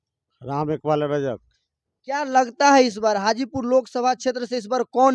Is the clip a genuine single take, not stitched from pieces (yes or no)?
yes